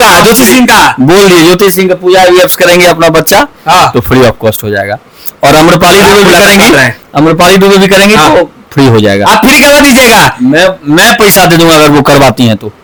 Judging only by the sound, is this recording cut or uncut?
uncut